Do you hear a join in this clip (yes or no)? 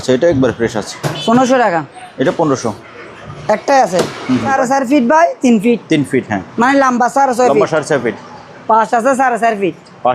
yes